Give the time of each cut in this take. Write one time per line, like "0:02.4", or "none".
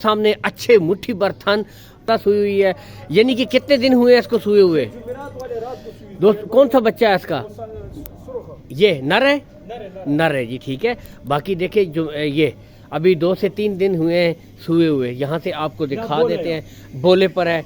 0:02.1